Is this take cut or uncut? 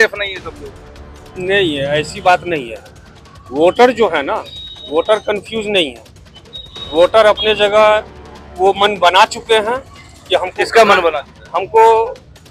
uncut